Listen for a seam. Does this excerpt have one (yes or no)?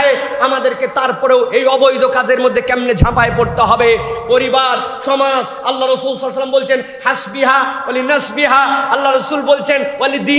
no